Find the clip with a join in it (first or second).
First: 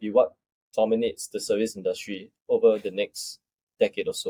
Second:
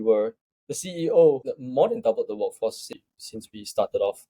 second